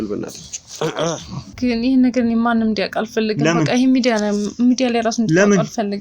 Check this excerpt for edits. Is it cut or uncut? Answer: cut